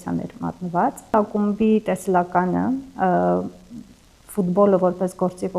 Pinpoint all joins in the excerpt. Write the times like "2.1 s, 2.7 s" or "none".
1.1 s